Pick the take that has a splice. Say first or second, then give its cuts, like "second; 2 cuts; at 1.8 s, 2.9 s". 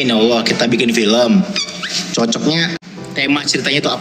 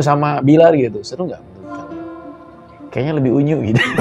first; 1 cut; at 2.9 s